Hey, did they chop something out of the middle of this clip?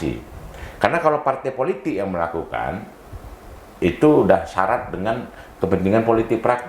no; 0 cuts

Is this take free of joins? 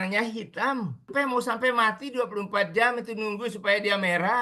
no; 1 cut; at 1.1 s

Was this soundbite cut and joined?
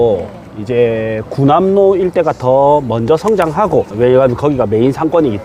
yes; 1 cut; at 3.9 s

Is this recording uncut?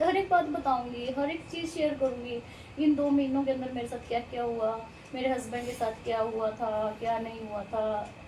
yes; 0 cuts

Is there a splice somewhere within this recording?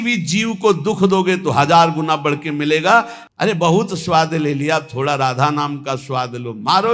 yes; 1 cut; at 3.2 s

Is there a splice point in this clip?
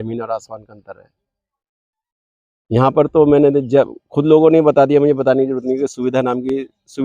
no; 0 cuts

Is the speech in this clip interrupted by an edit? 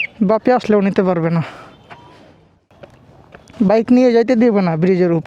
yes; 1 cut; at 2.6 s

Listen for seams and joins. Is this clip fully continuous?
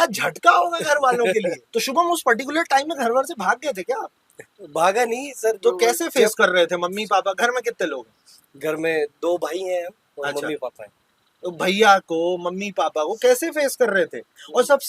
no; 1 cut; at 1.6 s

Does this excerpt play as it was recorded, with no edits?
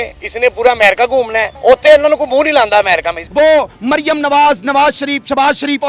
no; 2 cuts; at 1.5 s, 3.2 s

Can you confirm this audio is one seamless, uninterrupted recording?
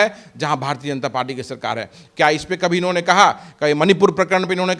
yes; 0 cuts

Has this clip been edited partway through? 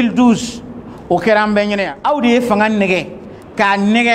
yes; 1 cut; at 1.9 s

